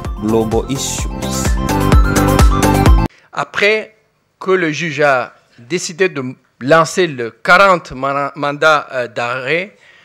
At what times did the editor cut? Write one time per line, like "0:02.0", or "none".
0:03.1